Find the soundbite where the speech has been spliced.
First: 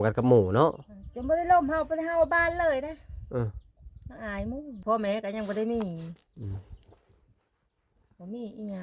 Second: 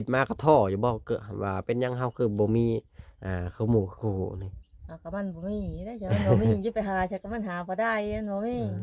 first; 1 cut; at 4.8 s

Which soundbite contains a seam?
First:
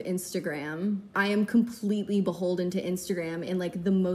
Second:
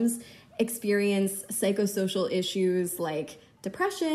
first; 1 cut; at 1.1 s

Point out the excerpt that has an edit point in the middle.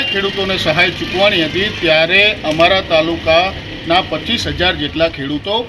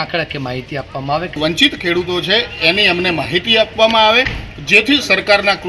second; 1 cut; at 1.4 s

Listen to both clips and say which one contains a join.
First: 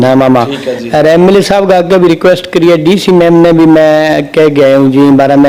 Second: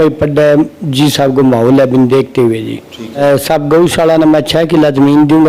second; 1 cut; at 3.2 s

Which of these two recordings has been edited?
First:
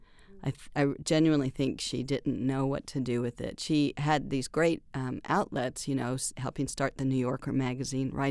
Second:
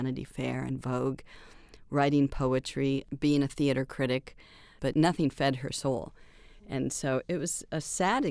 second; 3 cuts; at 3.1 s, 4.7 s, 7.3 s

